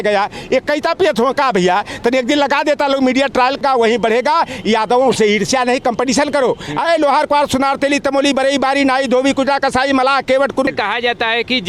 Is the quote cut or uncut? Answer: cut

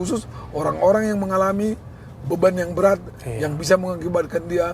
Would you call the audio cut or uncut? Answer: uncut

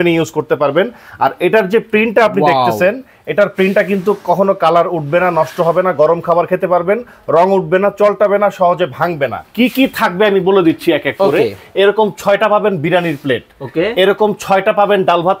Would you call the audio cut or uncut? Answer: cut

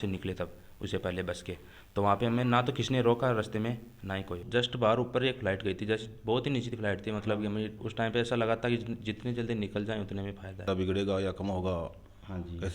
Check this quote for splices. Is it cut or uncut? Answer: cut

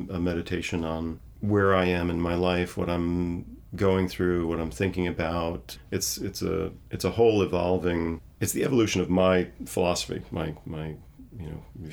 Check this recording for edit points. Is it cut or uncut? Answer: uncut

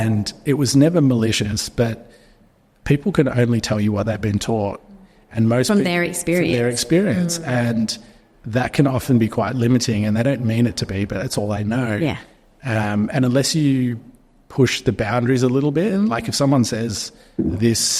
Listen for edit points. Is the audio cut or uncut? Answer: uncut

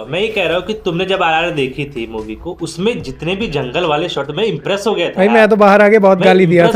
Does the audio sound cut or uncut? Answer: uncut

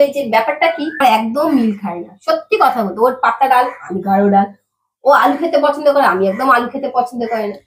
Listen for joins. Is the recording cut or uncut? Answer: cut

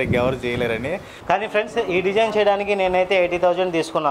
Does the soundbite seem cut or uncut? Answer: cut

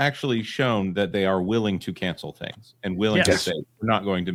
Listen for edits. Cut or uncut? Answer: uncut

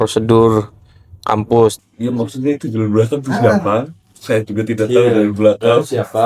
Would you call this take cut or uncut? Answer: cut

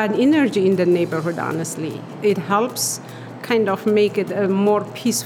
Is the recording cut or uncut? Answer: uncut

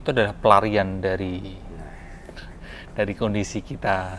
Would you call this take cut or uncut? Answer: uncut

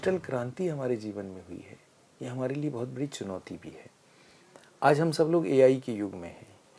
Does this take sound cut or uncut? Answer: uncut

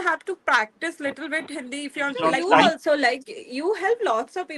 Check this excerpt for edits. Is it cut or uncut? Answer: cut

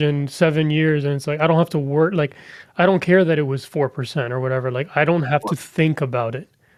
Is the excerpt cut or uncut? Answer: uncut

